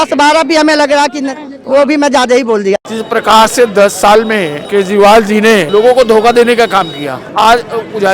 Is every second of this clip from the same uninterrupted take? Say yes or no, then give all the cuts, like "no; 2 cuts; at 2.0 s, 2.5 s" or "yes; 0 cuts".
no; 4 cuts; at 2.9 s, 4.6 s, 5.7 s, 7.3 s